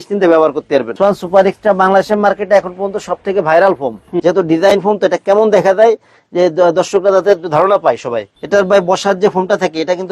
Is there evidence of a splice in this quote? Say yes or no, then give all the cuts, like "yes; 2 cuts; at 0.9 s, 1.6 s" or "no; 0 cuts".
yes; 3 cuts; at 0.9 s, 4.1 s, 8.3 s